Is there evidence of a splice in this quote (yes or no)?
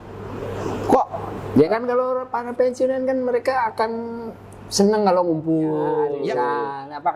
yes